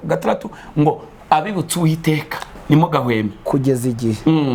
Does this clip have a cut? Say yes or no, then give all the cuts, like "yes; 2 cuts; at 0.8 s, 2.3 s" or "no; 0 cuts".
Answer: no; 0 cuts